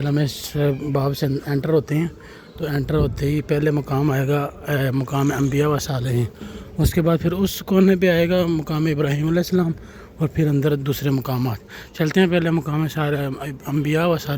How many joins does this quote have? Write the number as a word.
zero